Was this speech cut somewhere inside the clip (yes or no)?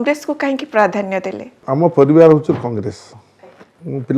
yes